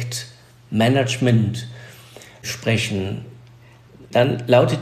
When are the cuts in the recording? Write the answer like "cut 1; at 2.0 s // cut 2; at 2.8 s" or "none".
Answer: none